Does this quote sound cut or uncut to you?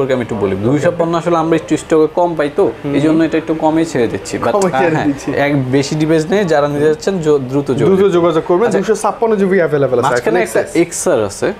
uncut